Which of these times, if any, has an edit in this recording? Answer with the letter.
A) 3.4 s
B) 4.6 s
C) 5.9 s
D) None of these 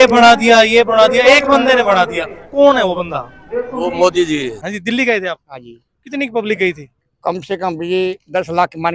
B